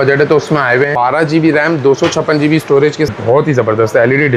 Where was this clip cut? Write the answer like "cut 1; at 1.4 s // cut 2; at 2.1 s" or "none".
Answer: cut 1; at 0.9 s // cut 2; at 3.1 s